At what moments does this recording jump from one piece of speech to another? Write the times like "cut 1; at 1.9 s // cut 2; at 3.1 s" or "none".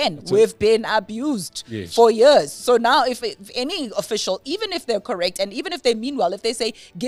none